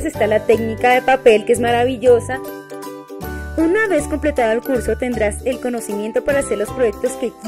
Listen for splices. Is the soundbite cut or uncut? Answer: cut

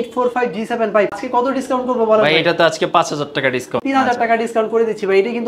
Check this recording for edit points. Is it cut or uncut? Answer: cut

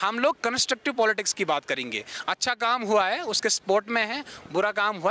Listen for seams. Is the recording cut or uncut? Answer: uncut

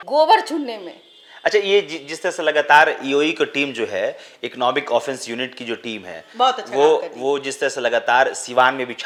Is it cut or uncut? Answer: uncut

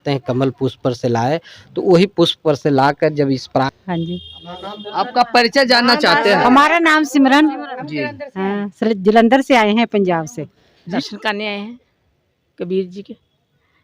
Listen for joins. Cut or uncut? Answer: cut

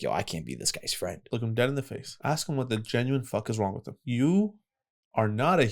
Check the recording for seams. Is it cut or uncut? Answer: cut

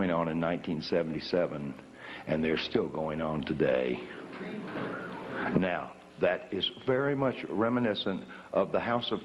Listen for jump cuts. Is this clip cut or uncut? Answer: cut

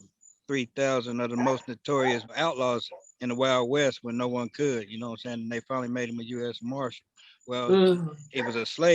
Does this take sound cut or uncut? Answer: cut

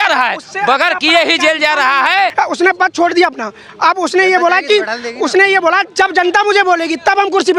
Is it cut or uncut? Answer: cut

